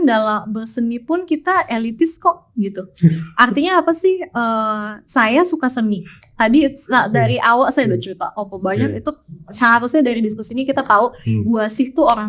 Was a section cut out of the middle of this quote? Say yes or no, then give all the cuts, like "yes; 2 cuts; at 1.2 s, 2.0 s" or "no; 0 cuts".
no; 0 cuts